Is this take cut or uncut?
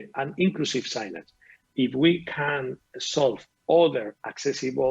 cut